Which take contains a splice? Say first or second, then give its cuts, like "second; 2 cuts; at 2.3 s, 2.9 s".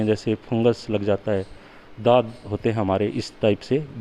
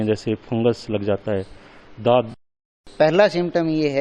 second; 1 cut; at 2.4 s